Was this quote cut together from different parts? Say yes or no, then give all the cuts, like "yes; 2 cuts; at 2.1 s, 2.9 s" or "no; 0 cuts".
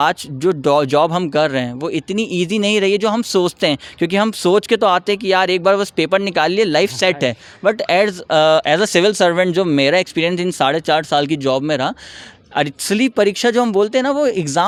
no; 0 cuts